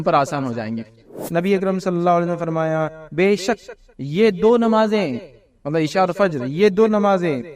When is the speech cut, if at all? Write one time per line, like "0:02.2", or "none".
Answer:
0:01.2